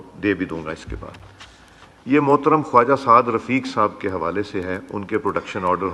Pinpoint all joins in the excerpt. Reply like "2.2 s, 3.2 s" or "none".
none